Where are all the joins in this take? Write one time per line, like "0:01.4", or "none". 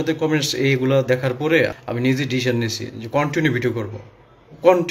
0:01.8